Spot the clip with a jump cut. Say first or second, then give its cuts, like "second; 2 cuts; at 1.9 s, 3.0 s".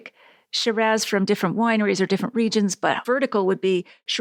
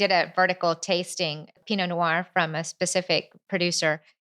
second; 2 cuts; at 1.6 s, 3.4 s